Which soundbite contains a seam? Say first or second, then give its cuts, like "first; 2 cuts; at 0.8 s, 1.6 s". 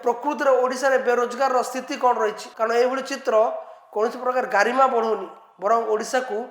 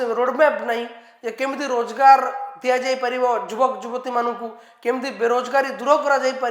first; 1 cut; at 2.5 s